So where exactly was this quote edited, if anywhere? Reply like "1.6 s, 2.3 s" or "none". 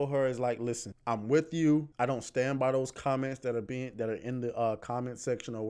0.9 s, 1.9 s